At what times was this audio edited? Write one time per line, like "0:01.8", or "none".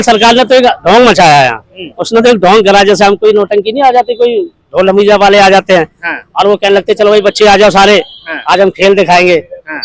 none

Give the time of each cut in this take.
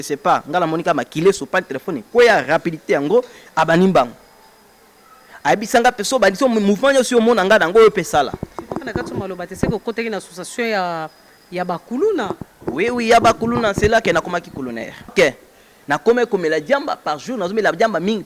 0:15.1

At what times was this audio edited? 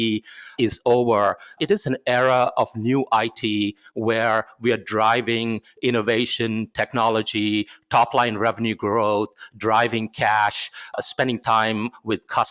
0:01.6
0:11.0

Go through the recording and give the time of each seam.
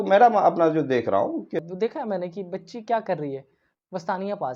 0:01.7

